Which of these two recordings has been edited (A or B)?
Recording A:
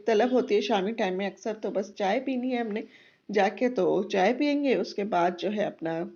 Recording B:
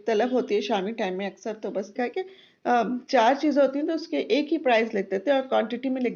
B